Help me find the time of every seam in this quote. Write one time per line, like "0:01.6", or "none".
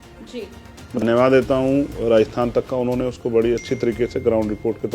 0:01.0